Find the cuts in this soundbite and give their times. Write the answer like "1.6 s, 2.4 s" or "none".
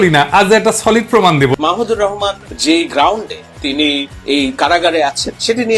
1.5 s, 2.5 s, 4.1 s